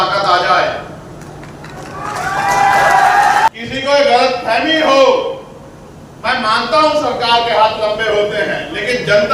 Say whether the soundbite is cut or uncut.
cut